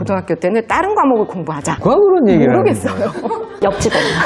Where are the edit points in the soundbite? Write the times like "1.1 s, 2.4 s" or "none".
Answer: 1.6 s